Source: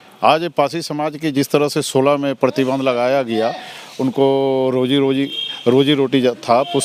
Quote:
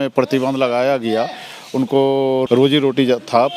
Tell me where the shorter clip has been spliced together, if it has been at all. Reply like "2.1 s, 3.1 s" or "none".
2.4 s